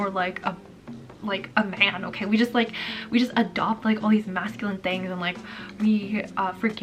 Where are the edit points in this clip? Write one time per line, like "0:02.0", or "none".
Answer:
none